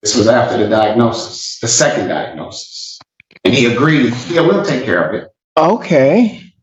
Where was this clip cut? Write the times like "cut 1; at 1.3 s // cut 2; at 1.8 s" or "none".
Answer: none